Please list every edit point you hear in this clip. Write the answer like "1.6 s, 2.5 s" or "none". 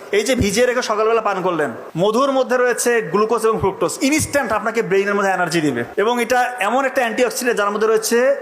2.2 s, 5.9 s